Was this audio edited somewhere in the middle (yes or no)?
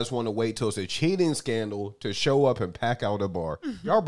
no